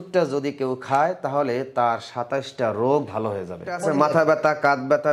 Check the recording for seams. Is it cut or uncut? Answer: cut